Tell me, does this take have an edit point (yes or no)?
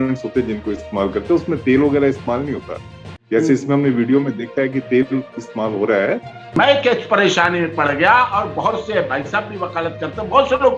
yes